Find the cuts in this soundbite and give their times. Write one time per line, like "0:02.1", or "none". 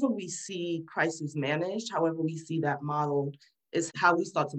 none